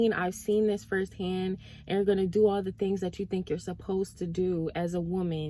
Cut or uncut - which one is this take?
uncut